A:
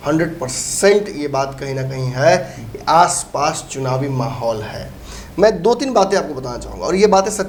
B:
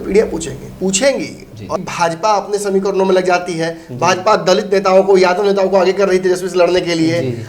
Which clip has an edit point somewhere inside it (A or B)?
B